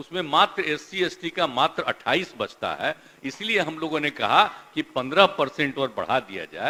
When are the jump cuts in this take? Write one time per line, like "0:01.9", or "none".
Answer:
none